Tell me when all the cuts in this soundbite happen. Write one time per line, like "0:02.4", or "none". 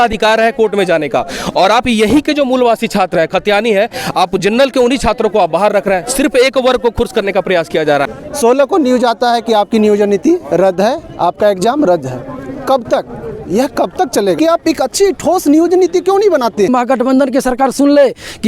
0:08.1
0:14.4
0:16.7